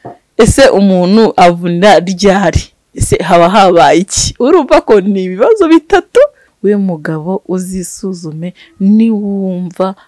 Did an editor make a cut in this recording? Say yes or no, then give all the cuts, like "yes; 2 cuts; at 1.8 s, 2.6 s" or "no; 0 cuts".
yes; 1 cut; at 6.5 s